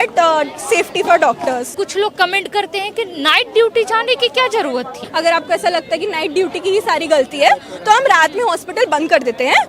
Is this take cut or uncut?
cut